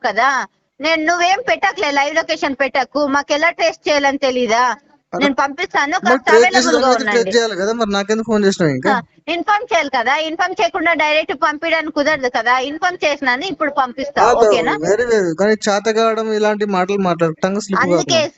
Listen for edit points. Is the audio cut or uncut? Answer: uncut